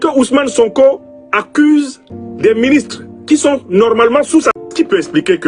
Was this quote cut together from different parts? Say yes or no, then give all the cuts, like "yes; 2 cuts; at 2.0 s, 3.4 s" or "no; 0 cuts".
yes; 1 cut; at 4.5 s